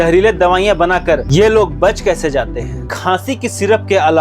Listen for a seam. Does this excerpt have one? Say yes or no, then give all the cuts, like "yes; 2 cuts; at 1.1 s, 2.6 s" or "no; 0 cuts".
yes; 1 cut; at 2.9 s